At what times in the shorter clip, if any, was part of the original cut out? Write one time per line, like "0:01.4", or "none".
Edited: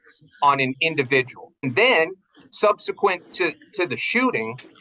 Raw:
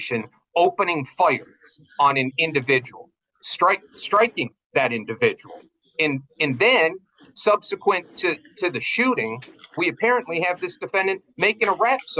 0:01.5